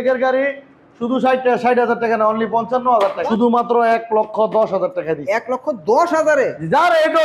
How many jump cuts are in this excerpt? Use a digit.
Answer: 1